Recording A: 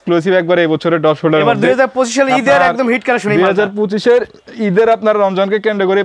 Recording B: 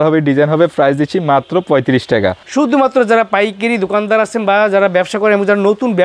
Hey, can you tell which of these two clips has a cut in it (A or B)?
B